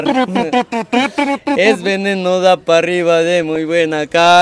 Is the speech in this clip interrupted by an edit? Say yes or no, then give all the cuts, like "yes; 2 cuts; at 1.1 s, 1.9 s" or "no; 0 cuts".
no; 0 cuts